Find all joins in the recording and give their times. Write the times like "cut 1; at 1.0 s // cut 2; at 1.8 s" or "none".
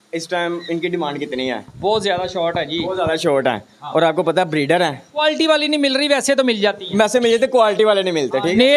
none

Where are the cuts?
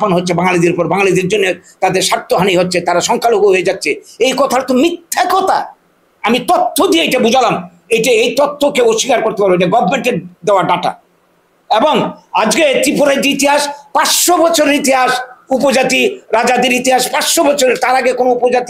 none

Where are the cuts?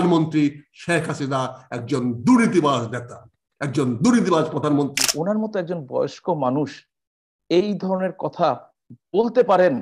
cut 1; at 5.0 s

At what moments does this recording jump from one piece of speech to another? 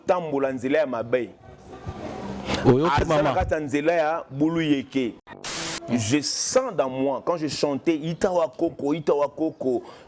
cut 1; at 5.5 s

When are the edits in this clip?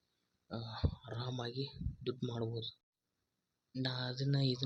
cut 1; at 2.8 s

